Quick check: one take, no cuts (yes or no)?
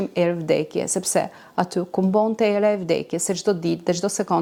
yes